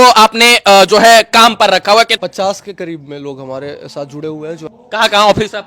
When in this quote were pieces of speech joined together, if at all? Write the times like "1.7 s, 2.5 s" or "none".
2.2 s, 4.6 s